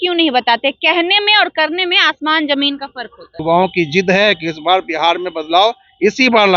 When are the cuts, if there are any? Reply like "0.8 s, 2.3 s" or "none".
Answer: 3.4 s